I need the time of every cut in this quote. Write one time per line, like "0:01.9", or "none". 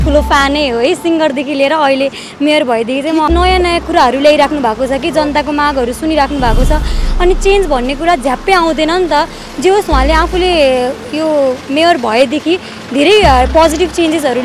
0:03.3